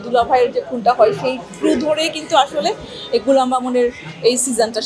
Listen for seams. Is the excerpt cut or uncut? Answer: uncut